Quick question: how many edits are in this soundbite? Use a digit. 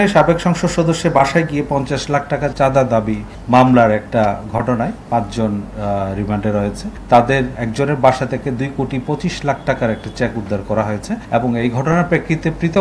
5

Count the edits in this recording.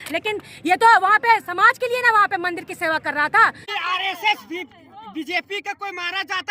1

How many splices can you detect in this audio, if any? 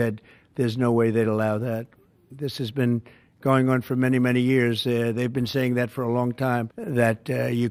0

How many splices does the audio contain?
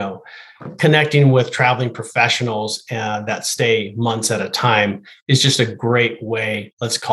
0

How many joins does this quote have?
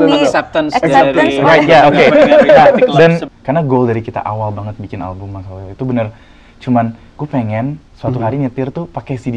1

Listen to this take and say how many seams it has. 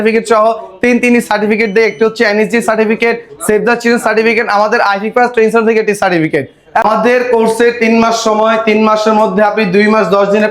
1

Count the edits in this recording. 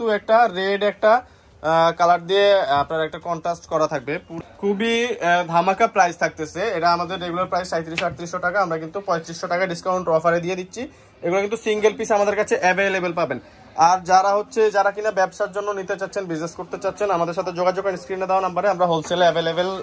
1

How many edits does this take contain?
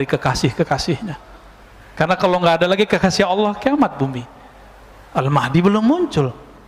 0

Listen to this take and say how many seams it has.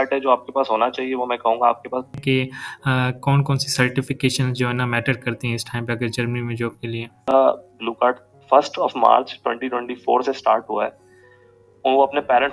2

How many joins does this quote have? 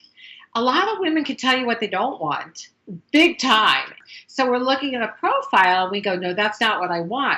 1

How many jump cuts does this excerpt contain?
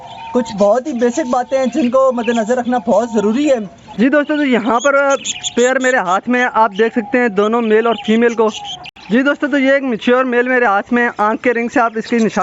2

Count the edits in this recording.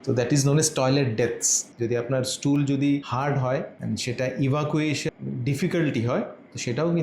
3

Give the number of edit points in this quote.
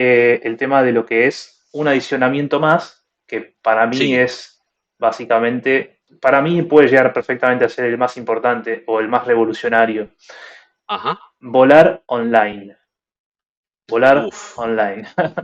1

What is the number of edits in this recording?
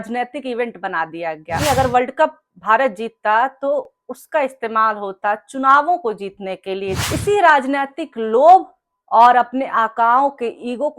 2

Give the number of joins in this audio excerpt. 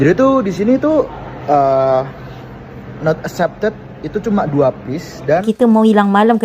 1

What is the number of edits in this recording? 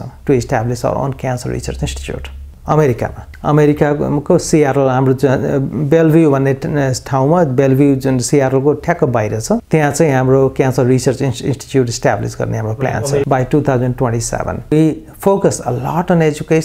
3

